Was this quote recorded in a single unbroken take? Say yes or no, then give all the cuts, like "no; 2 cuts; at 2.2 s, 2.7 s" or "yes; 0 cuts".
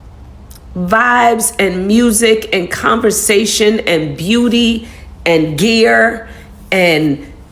yes; 0 cuts